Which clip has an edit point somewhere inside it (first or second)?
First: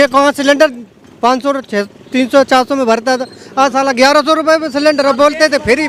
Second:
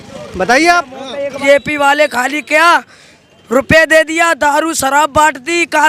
second